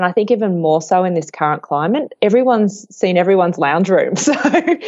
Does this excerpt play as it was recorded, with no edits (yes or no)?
yes